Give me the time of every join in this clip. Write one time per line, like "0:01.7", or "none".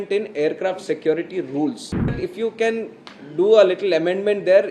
0:02.2

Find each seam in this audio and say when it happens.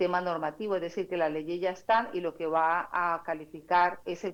none

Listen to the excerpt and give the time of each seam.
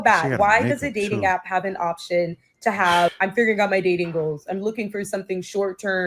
none

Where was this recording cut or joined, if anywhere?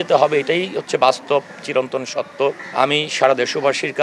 none

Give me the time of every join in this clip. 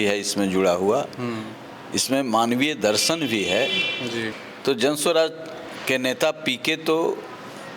0:04.4

